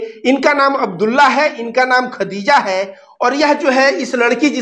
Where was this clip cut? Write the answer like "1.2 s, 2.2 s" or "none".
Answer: none